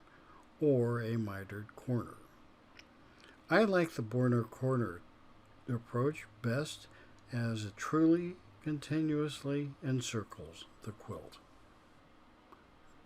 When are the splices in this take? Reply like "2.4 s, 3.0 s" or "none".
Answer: 12.0 s